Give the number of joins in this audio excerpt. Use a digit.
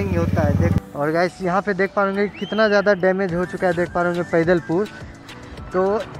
2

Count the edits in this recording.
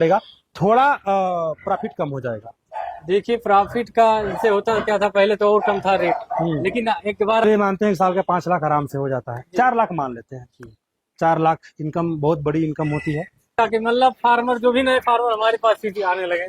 2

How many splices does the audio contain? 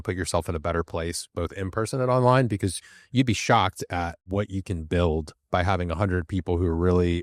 1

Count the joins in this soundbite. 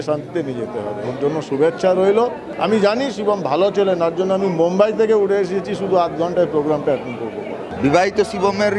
2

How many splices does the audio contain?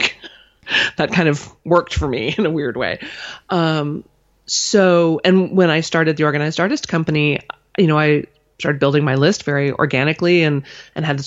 0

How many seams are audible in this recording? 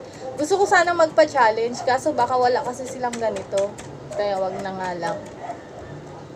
0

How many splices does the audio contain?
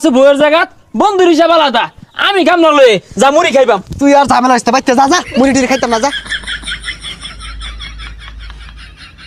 0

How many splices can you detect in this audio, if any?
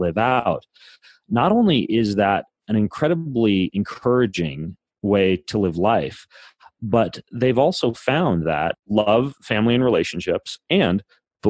1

